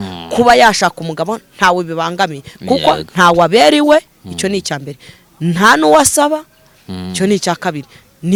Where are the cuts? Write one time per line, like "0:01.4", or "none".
none